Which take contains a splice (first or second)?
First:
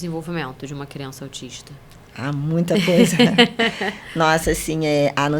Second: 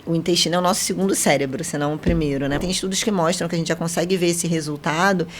second